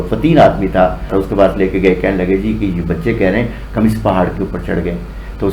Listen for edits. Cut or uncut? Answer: cut